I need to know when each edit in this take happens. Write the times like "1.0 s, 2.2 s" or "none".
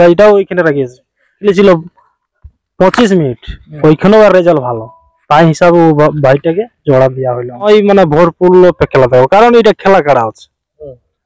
1.4 s, 7.6 s

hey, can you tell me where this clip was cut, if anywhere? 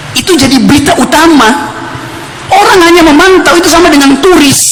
none

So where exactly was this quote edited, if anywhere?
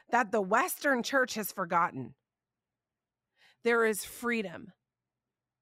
none

